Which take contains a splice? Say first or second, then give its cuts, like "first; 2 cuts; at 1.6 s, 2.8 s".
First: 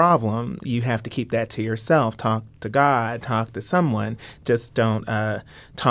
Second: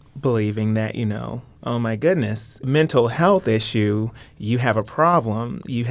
second; 1 cut; at 2.6 s